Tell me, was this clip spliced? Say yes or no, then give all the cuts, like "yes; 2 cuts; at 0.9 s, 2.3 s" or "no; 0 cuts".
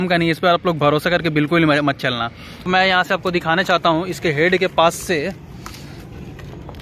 yes; 1 cut; at 2.7 s